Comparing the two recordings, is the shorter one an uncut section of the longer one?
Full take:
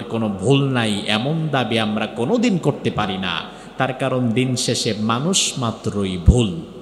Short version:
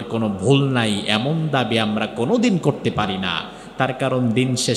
yes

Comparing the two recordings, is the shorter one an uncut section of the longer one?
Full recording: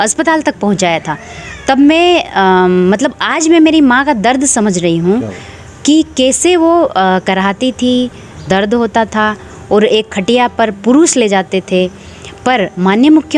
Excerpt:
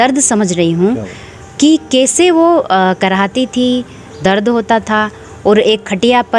yes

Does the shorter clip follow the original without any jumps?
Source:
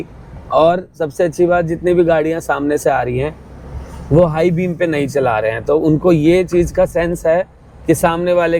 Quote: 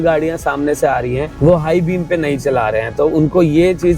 no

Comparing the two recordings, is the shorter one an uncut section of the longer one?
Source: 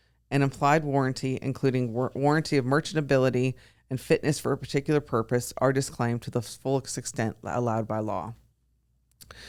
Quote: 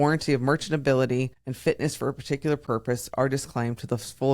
no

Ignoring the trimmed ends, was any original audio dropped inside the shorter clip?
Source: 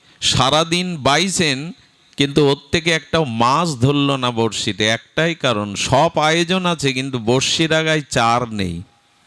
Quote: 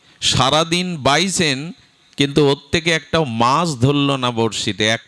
no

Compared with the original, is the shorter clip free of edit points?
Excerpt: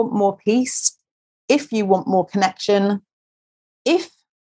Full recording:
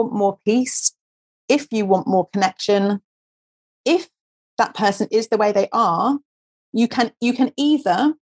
yes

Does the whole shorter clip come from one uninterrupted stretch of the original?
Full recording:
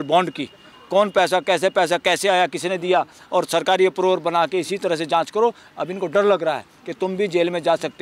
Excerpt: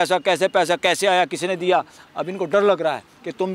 no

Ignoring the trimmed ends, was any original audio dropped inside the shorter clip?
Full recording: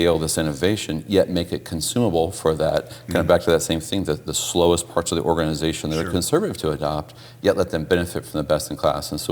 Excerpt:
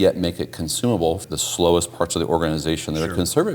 yes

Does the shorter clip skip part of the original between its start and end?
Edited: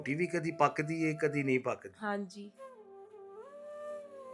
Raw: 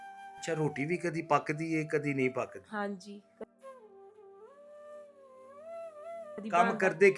yes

